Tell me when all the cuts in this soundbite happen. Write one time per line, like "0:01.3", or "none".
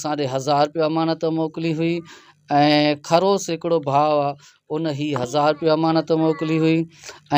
none